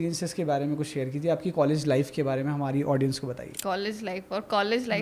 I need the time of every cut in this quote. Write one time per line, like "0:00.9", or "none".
0:03.5

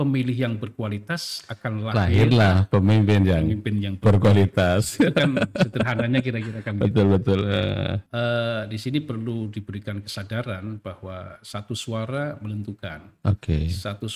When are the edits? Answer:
0:08.0

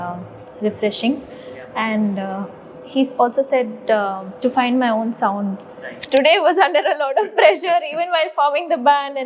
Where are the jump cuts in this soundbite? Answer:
0:06.0

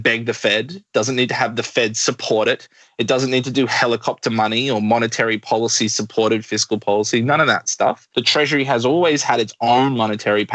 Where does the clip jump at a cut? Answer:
0:08.0

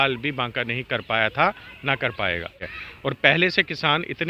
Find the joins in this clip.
0:02.7

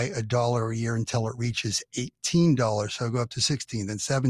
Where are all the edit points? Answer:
none

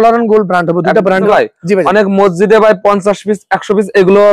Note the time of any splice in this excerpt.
0:01.3

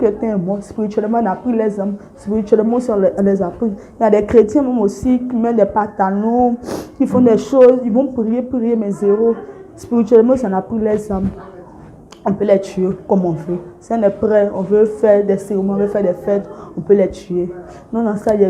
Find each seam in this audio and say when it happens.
none

